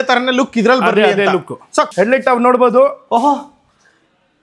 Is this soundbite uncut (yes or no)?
no